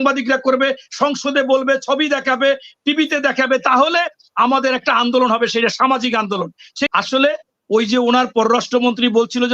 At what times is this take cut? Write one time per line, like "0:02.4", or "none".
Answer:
0:06.9